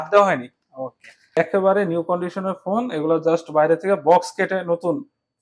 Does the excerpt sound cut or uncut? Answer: cut